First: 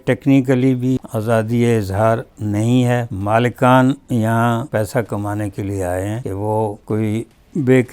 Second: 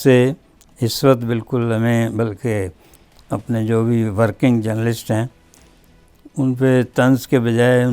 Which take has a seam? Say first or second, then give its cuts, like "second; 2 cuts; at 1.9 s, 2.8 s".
first; 4 cuts; at 1.0 s, 3.1 s, 4.7 s, 6.4 s